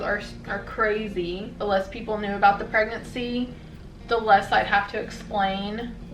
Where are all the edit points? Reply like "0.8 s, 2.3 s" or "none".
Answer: 1.5 s